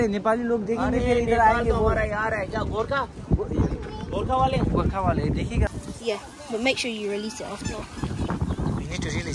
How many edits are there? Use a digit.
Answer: 1